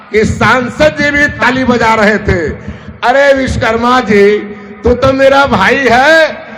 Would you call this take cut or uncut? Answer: cut